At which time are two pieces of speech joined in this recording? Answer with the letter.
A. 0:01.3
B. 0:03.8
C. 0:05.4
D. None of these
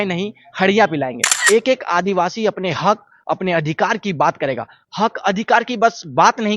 A